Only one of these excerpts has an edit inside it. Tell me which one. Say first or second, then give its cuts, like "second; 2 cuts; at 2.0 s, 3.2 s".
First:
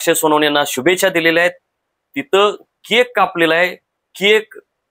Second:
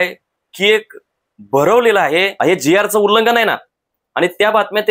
second; 1 cut; at 2.3 s